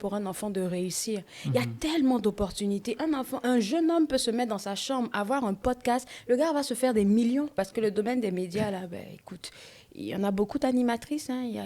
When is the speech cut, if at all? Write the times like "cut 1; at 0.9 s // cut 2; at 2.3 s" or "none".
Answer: cut 1; at 7.5 s